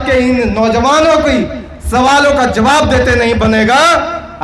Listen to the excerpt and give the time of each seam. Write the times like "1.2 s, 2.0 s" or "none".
none